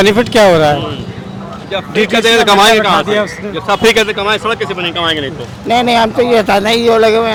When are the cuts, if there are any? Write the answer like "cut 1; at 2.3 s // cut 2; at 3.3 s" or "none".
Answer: none